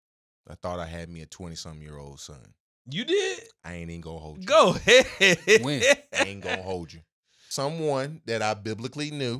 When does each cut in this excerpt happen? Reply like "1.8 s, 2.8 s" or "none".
7.4 s